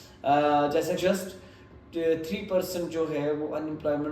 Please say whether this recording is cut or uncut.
cut